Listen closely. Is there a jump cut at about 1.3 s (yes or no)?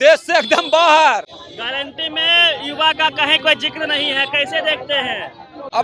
no